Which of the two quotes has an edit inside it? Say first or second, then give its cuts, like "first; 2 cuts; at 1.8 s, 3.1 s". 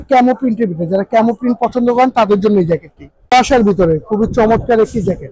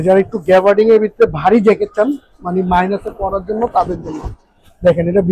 first; 1 cut; at 3.3 s